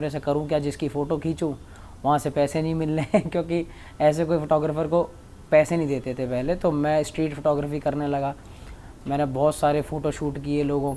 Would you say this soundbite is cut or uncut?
uncut